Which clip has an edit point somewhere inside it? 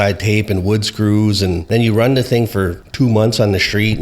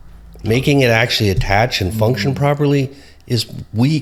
first; 2 cuts; at 1.6 s, 2.8 s

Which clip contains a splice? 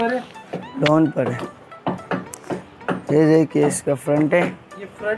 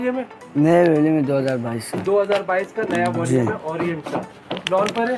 first; 1 cut; at 1.6 s

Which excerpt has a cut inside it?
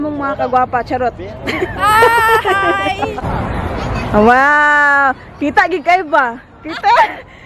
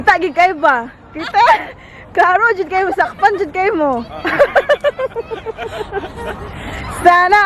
first; 1 cut; at 3.2 s

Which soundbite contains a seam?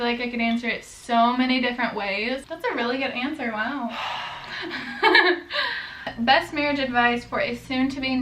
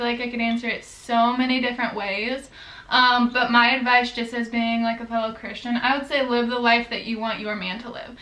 first; 2 cuts; at 2.5 s, 6.1 s

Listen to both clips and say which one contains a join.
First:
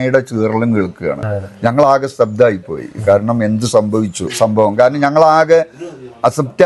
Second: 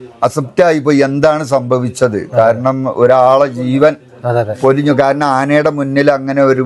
first; 2 cuts; at 1.2 s, 4.3 s

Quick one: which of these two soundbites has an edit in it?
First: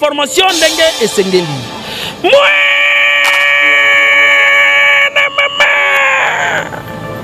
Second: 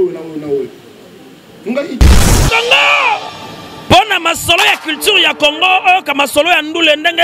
second; 1 cut; at 2.0 s

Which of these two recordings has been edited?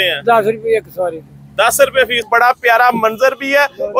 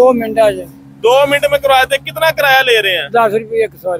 first; 1 cut; at 2.2 s

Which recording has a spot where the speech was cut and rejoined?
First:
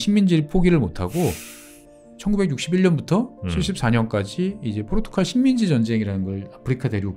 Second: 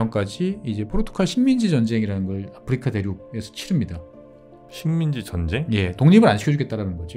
first; 1 cut; at 1.8 s

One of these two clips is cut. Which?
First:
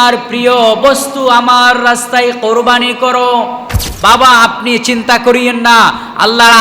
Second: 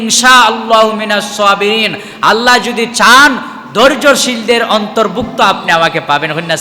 first; 1 cut; at 3.8 s

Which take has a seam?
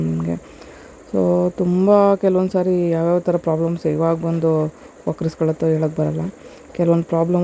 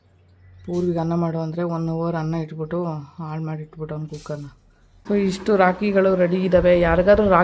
second; 1 cut; at 4.9 s

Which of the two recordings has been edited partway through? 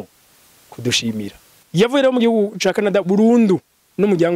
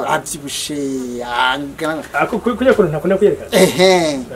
first; 1 cut; at 1.6 s

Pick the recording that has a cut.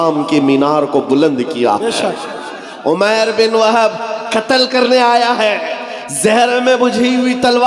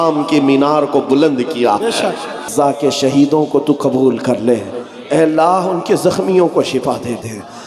second; 1 cut; at 2.5 s

